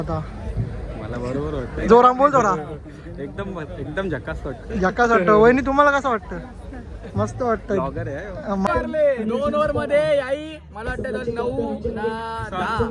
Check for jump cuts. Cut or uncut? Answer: cut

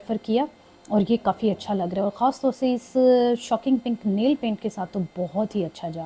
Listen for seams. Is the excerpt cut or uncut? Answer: uncut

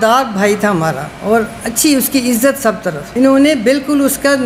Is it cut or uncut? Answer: uncut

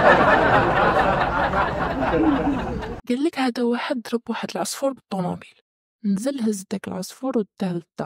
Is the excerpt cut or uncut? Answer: cut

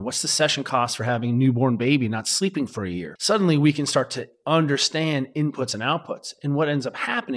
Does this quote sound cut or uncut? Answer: cut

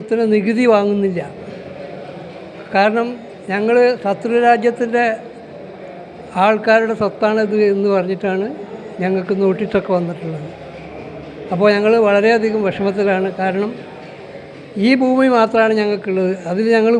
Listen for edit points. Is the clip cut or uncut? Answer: uncut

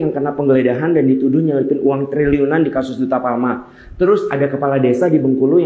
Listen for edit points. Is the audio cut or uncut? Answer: uncut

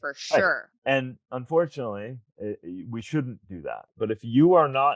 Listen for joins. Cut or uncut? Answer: cut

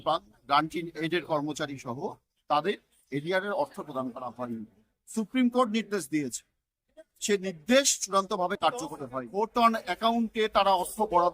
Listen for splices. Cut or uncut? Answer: cut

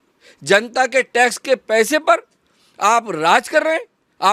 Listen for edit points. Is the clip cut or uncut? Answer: uncut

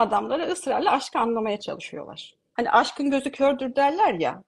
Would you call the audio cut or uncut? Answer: cut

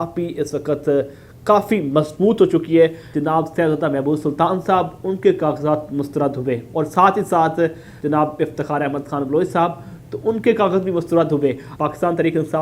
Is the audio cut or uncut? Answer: cut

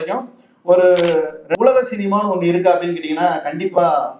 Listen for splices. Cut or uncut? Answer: cut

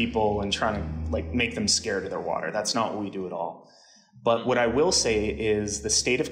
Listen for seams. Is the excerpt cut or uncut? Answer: uncut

